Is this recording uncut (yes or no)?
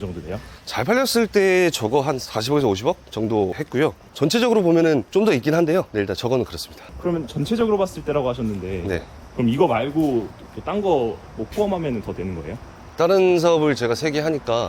yes